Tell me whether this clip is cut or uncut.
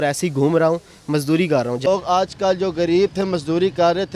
cut